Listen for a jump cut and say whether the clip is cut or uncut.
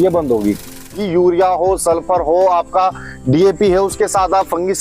cut